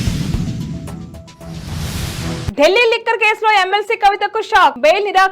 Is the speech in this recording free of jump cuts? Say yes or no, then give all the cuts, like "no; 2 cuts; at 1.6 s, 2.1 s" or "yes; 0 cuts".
no; 1 cut; at 1.9 s